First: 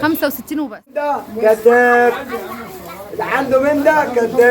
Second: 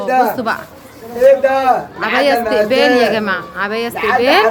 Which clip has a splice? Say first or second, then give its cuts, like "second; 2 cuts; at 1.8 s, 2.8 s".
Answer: first; 1 cut; at 1.2 s